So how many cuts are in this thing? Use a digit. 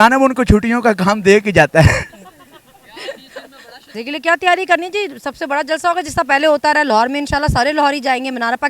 1